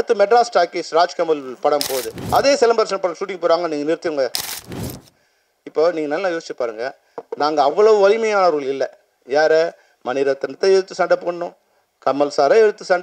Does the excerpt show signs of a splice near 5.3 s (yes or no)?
no